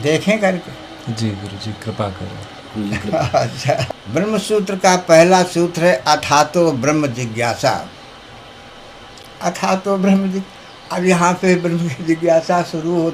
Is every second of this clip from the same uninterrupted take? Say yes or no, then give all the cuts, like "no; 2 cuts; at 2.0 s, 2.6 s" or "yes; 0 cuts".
no; 2 cuts; at 4.0 s, 9.3 s